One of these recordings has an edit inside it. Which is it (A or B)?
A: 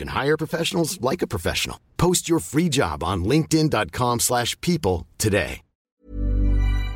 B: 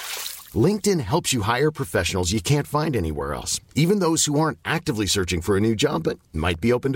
A